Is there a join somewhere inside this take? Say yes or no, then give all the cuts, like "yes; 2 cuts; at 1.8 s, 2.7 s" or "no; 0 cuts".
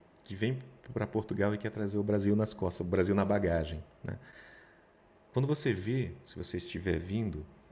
no; 0 cuts